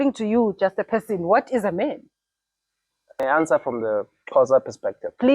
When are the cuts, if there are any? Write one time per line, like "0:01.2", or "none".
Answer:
0:03.2

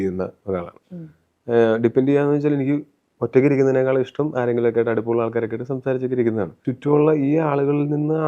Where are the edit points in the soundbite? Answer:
0:06.7

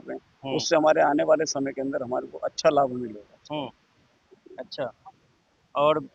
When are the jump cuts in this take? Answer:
none

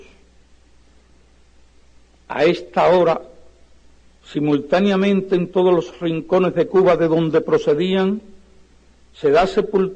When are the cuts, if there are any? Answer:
0:02.0

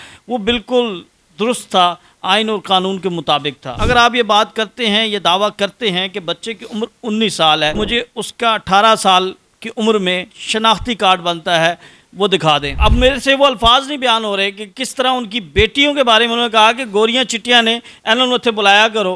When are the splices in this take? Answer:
0:03.7
0:07.8
0:12.7

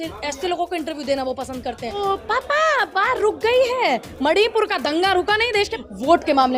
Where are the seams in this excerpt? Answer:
0:02.0
0:05.8

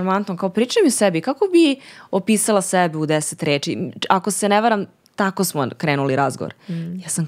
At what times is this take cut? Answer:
none

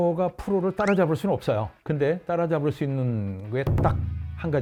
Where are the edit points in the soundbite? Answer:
none

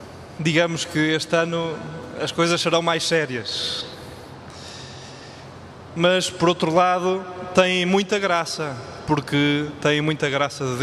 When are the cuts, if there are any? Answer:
none

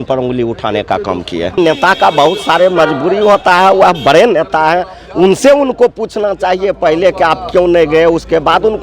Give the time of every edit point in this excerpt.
0:01.6

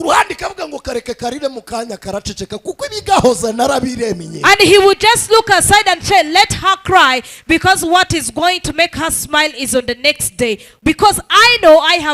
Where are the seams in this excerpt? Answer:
none

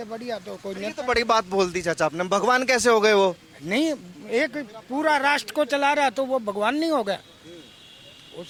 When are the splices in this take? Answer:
none

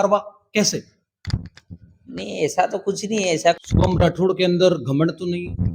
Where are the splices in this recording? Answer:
0:03.4

